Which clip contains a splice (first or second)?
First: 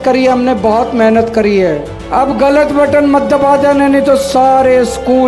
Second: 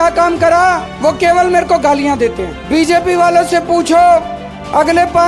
second